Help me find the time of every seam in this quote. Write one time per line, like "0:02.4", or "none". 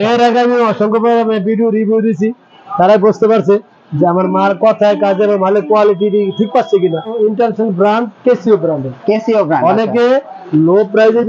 0:07.1